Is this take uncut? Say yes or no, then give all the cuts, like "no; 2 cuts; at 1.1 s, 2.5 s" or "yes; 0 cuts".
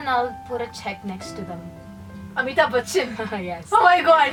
yes; 0 cuts